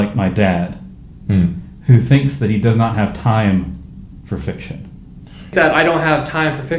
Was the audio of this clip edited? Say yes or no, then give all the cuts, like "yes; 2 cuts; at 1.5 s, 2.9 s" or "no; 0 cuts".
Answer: yes; 1 cut; at 5.5 s